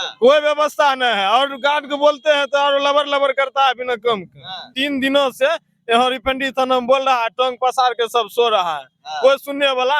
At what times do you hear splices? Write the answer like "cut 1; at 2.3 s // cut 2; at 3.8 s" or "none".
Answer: cut 1; at 4.7 s